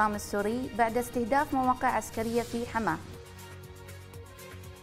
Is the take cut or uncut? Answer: cut